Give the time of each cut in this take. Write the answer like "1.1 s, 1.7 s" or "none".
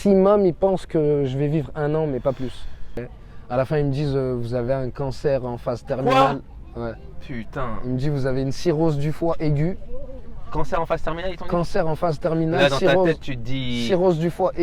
3.0 s